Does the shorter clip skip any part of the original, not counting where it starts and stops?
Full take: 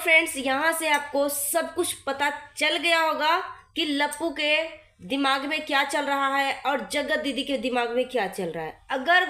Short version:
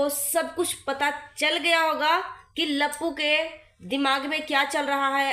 no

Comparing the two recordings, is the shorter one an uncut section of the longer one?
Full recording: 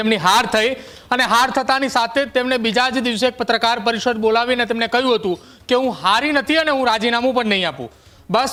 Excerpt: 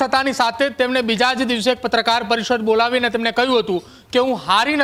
yes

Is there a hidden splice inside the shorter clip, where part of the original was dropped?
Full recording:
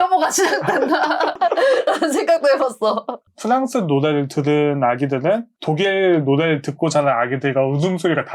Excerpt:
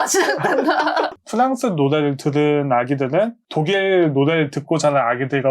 yes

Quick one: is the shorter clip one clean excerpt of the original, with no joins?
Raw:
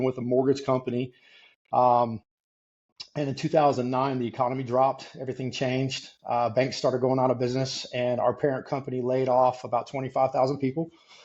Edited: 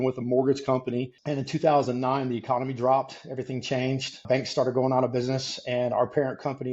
no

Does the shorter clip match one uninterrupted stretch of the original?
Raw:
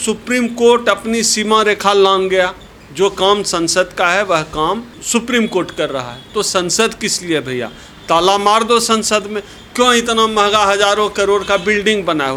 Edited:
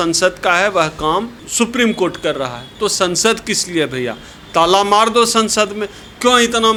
yes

